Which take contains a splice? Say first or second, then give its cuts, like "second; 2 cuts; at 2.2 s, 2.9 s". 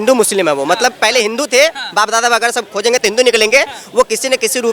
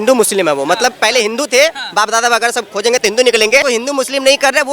second; 1 cut; at 3.6 s